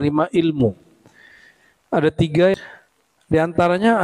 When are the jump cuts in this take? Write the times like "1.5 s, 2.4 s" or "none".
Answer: 2.5 s